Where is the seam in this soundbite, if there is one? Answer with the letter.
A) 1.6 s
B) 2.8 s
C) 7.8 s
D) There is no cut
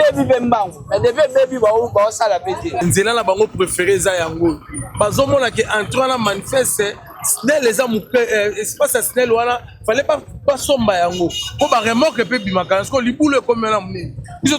B